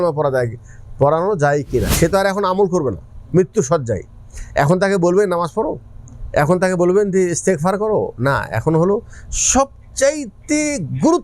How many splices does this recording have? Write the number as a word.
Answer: one